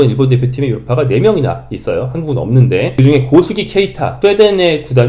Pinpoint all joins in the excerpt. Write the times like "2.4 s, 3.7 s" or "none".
2.9 s, 4.0 s